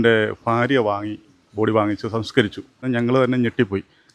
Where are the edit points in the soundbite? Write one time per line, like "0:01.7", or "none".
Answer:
0:02.8